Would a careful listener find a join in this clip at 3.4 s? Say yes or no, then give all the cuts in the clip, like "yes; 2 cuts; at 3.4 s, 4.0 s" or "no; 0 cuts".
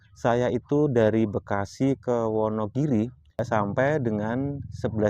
yes; 1 cut; at 3.4 s